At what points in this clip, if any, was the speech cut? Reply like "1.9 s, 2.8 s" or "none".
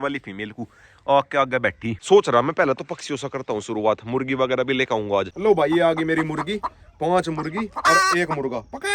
2.0 s, 5.3 s

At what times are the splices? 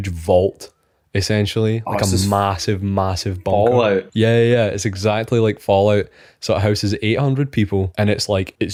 none

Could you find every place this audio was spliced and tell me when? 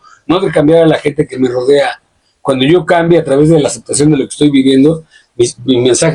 none

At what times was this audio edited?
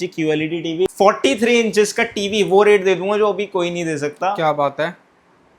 0.9 s

